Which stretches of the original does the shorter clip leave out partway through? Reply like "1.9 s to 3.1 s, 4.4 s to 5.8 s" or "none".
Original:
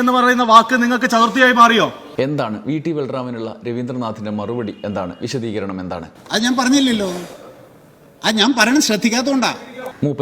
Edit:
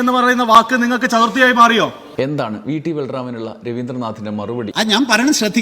4.7 s to 8.2 s